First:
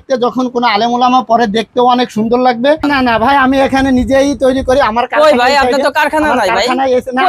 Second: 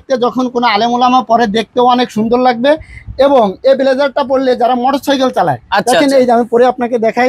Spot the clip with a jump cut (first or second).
first